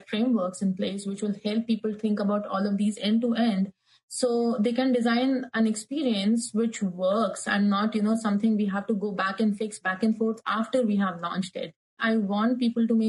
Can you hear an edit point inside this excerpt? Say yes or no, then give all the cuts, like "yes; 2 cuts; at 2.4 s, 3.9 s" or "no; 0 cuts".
yes; 1 cut; at 12.0 s